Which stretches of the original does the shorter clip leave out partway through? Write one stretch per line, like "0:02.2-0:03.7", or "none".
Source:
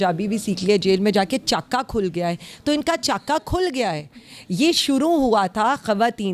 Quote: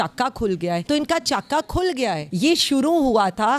0:02.4-0:02.6
0:04.0-0:04.4